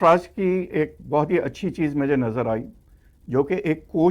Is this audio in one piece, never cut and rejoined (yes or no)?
yes